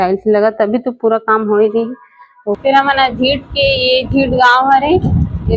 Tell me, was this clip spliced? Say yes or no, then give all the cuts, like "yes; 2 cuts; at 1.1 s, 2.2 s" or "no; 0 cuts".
yes; 1 cut; at 2.6 s